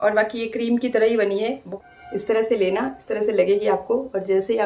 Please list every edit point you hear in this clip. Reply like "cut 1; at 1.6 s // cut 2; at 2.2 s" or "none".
cut 1; at 1.6 s